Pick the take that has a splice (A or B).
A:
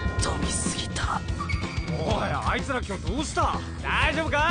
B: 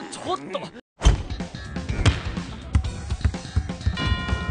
B